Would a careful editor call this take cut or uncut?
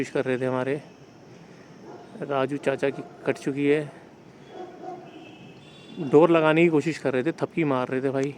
uncut